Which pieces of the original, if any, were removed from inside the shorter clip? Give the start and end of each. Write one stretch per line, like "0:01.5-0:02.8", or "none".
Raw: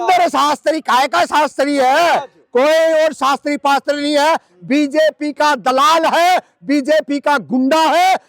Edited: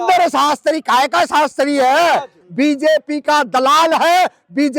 0:02.4-0:04.5